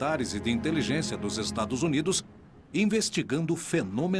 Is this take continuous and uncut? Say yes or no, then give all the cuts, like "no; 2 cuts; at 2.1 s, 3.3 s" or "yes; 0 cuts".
yes; 0 cuts